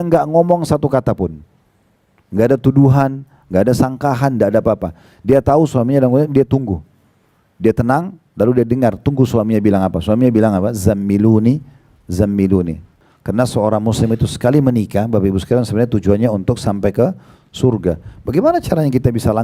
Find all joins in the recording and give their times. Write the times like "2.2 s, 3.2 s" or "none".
12.9 s